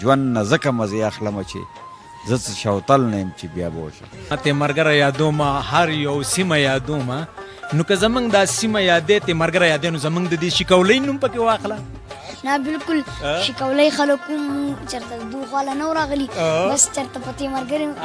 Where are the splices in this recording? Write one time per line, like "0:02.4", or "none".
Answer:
0:04.3